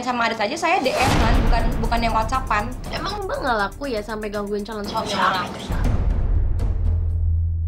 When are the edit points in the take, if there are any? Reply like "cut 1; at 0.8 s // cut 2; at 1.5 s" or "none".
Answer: none